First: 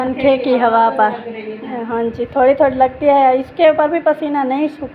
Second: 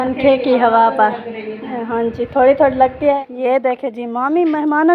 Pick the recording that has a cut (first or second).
second